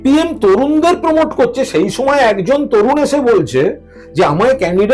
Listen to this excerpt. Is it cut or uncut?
uncut